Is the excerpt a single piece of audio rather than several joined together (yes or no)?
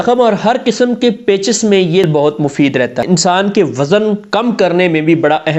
no